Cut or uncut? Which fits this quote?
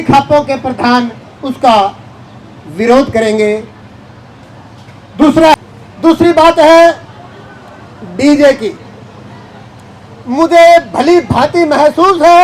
cut